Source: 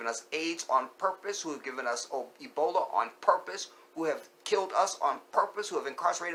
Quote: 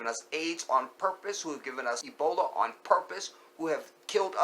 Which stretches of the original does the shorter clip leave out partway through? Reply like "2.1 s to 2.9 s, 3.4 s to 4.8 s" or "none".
2.0 s to 2.4 s